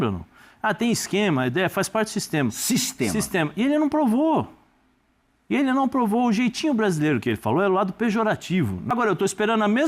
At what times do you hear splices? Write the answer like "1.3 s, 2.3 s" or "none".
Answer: 8.8 s